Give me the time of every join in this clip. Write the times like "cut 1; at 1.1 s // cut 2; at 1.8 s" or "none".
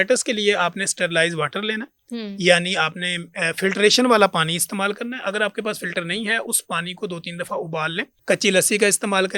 cut 1; at 8.1 s